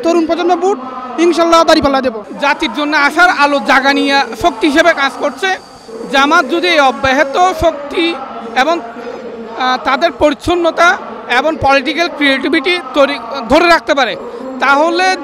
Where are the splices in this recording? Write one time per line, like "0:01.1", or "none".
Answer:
0:02.2